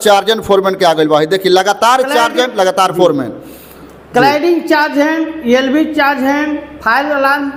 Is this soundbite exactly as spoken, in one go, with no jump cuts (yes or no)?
yes